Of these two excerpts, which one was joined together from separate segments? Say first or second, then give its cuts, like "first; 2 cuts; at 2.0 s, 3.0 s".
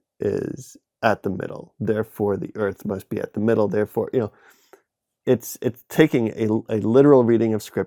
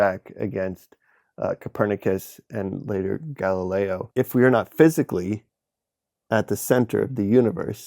second; 1 cut; at 4.0 s